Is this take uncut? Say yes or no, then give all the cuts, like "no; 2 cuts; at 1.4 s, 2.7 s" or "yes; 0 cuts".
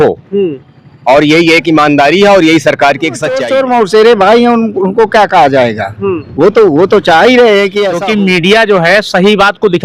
no; 2 cuts; at 3.4 s, 7.9 s